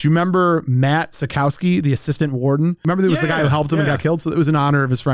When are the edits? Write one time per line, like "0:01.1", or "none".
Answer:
0:02.8